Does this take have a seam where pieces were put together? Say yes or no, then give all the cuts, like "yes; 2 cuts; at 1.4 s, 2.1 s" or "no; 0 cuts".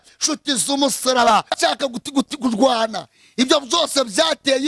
yes; 1 cut; at 1.6 s